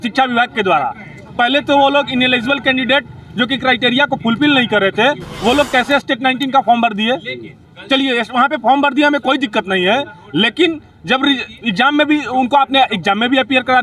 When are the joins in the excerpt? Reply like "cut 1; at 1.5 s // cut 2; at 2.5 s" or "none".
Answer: none